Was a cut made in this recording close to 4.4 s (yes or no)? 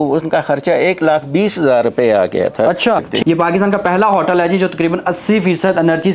no